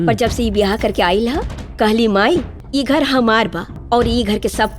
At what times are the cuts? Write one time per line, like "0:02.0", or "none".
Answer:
0:02.6
0:03.7